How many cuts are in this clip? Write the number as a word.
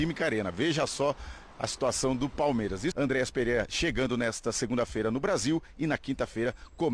one